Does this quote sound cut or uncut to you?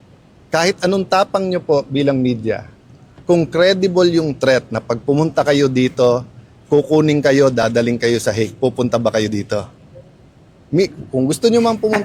uncut